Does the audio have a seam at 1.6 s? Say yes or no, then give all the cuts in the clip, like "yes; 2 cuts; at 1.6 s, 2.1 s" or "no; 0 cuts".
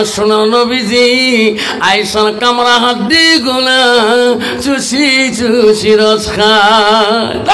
no; 0 cuts